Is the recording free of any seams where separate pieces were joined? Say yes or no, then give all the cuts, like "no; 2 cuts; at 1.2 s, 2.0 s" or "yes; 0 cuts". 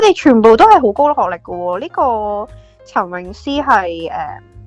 yes; 0 cuts